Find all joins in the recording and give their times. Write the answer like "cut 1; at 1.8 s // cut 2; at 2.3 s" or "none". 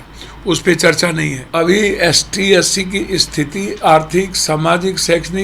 cut 1; at 1.4 s